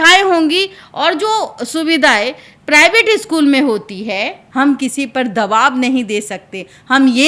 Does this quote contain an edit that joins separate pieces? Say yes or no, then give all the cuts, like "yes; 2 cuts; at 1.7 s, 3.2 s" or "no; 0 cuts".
yes; 1 cut; at 4.4 s